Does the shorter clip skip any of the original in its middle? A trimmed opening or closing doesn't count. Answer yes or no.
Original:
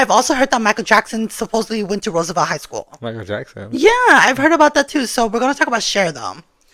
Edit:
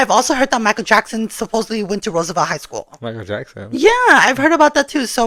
no